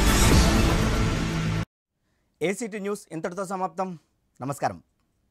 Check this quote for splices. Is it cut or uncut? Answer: uncut